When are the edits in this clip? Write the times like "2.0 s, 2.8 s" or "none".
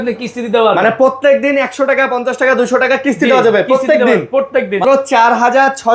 4.8 s